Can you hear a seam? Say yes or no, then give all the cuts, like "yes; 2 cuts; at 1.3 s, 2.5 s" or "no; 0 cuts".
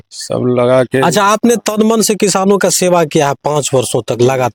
no; 0 cuts